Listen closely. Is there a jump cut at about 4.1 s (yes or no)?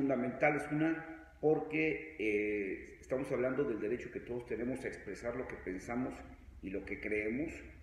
yes